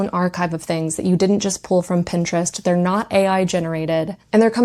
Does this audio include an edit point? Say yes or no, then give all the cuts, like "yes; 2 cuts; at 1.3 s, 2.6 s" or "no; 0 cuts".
no; 0 cuts